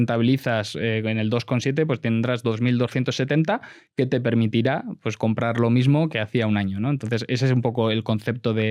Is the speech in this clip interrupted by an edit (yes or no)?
no